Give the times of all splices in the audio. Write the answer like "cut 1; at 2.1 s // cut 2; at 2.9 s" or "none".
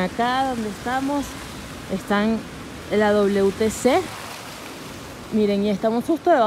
none